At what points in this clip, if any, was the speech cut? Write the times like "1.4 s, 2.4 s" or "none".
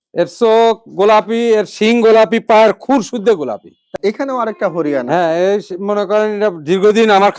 3.9 s